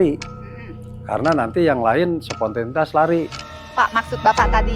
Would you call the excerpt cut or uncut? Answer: cut